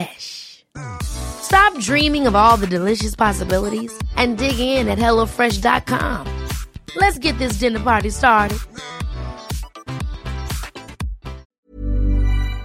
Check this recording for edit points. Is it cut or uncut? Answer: cut